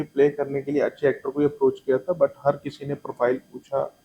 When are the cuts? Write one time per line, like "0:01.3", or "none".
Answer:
none